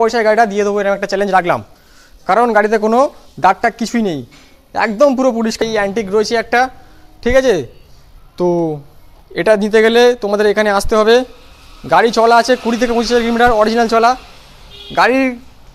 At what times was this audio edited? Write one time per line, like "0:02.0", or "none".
0:05.6